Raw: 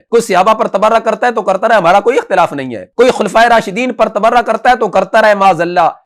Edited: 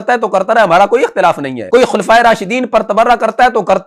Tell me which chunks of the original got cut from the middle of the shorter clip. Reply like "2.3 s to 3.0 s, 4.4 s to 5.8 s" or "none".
2.7 s to 2.8 s